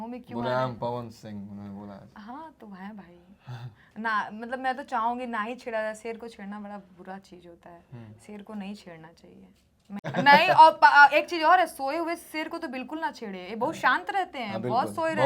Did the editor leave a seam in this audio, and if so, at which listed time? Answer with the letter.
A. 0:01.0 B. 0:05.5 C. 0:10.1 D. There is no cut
C